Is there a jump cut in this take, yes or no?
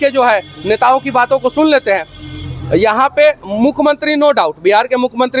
no